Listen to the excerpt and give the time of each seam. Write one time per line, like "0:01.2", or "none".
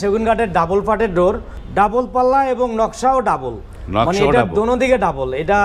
0:01.5